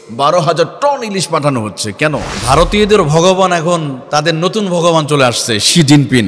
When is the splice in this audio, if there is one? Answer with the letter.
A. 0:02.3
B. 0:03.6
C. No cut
A